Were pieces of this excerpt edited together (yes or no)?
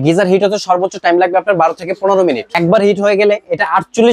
yes